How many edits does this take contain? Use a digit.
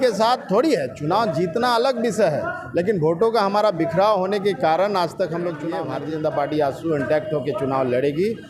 1